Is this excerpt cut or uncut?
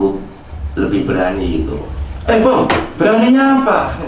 uncut